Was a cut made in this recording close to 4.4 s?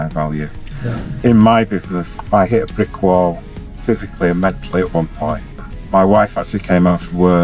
no; 2 cuts; at 1.2 s, 5.7 s

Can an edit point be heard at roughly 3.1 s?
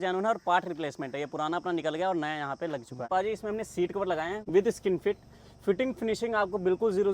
yes; 2 cuts; at 3.1 s, 4.4 s

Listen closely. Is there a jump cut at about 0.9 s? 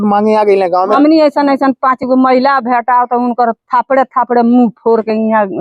yes; 1 cut; at 0.9 s

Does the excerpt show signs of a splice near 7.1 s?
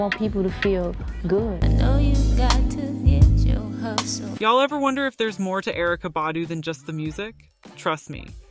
no; 2 cuts; at 1.6 s, 4.3 s

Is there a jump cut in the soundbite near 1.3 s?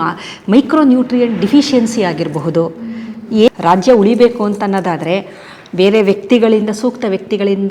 no; 1 cut; at 3.5 s

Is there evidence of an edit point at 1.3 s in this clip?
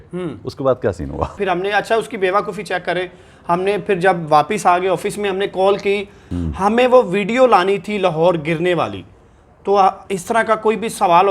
yes; 2 cuts; at 1.3 s, 6.3 s

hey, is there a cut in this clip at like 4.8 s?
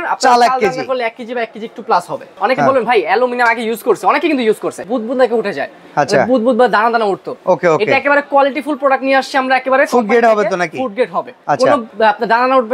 yes; 3 cuts; at 2.3 s, 4.8 s, 11.7 s

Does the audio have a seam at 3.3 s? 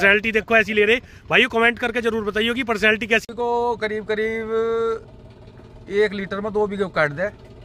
yes; 1 cut; at 3.3 s

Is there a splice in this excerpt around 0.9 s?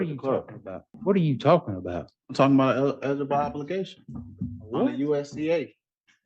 yes; 1 cut; at 0.9 s

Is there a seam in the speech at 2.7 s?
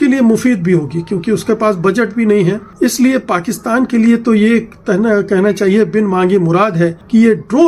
yes; 1 cut; at 2.7 s

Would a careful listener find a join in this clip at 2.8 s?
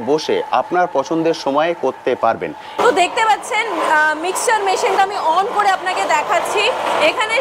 yes; 1 cut; at 2.8 s

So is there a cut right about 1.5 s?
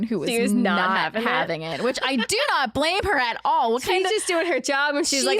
no; 0 cuts

